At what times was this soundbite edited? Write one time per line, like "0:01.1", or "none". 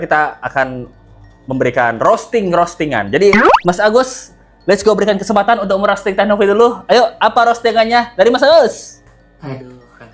none

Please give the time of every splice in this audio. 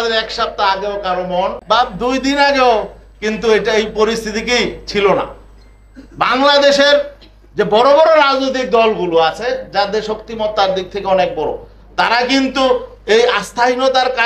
0:01.6

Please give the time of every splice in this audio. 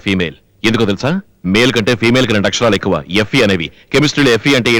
none

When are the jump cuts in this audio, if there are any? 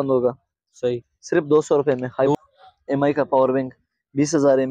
0:02.4

